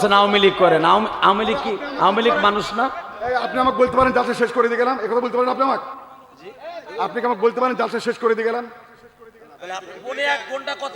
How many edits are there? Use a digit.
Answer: 0